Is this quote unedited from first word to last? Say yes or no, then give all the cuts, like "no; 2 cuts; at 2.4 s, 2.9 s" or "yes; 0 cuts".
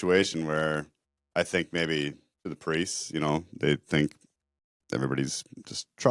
yes; 0 cuts